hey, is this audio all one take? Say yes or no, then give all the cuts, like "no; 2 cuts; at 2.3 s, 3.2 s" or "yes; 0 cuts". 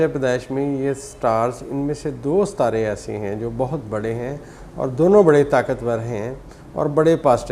yes; 0 cuts